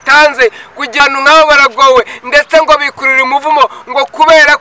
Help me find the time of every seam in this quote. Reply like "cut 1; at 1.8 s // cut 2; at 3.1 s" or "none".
cut 1; at 1.0 s